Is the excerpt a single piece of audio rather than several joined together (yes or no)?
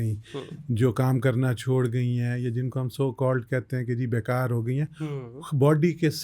yes